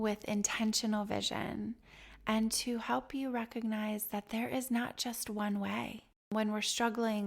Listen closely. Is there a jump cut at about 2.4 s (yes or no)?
no